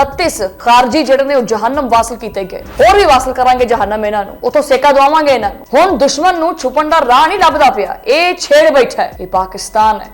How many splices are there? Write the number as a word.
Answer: two